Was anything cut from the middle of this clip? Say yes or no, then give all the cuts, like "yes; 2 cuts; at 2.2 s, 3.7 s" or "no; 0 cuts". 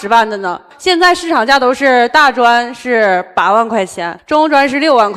no; 0 cuts